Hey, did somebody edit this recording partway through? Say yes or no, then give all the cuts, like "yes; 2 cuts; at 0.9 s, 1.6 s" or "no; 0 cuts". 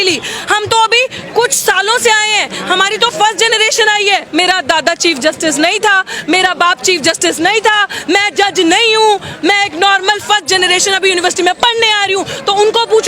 yes; 1 cut; at 4.3 s